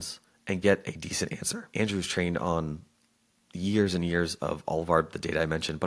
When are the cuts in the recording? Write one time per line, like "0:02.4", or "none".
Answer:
0:01.7